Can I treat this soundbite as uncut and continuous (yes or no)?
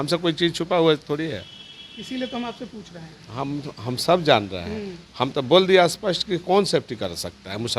yes